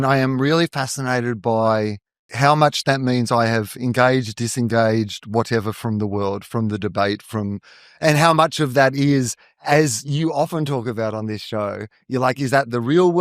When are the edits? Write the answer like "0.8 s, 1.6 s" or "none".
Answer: 2.3 s